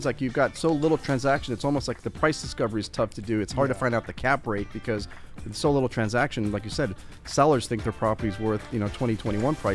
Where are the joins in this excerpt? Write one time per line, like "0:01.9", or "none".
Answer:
none